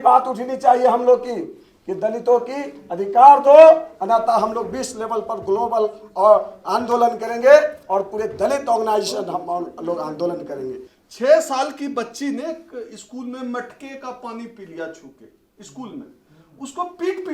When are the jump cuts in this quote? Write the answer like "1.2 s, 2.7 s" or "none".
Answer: 10.9 s

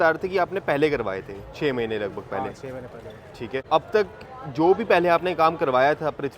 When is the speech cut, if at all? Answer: 3.6 s

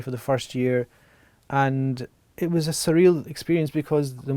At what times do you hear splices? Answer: 2.2 s

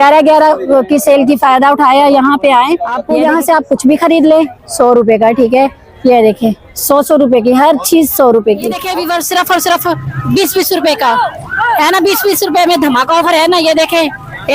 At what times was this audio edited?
3.0 s, 8.9 s

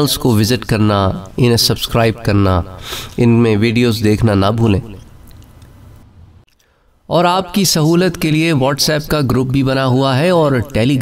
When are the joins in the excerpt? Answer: 6.4 s

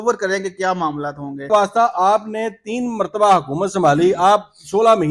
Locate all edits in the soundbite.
1.5 s

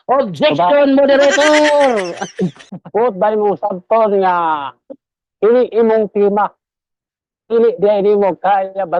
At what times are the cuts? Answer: 2.7 s

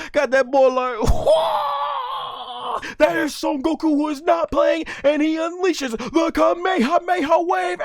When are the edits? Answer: 2.8 s

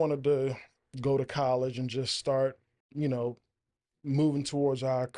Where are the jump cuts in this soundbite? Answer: none

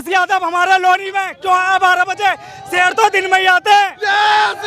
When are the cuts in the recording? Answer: none

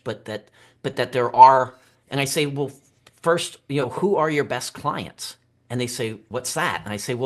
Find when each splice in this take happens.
6.2 s

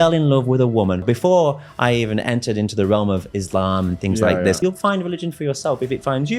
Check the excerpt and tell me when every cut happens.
1.0 s, 4.6 s

